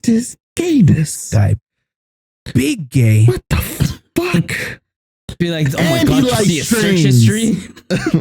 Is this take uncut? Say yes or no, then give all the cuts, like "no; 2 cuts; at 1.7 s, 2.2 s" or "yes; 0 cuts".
yes; 0 cuts